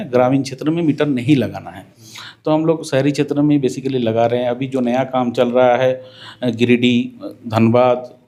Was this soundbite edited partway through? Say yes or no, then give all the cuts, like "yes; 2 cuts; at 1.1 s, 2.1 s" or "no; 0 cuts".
no; 0 cuts